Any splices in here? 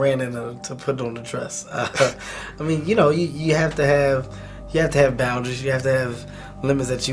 no; 0 cuts

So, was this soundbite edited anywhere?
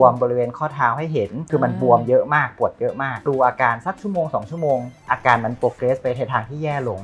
yes; 2 cuts; at 1.4 s, 3.2 s

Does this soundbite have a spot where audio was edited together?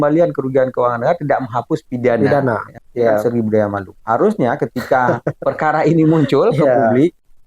yes; 1 cut; at 2.7 s

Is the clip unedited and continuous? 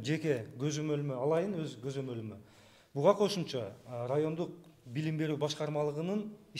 yes; 0 cuts

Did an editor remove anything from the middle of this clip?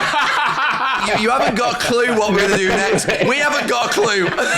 yes; 1 cut; at 1.0 s

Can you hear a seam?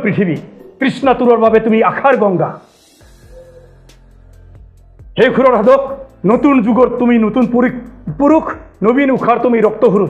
no; 0 cuts

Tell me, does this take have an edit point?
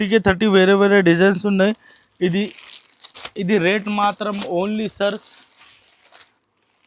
no; 0 cuts

